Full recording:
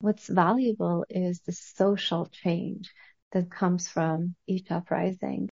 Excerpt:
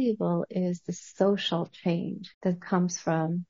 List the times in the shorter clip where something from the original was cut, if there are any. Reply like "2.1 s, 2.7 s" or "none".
2.2 s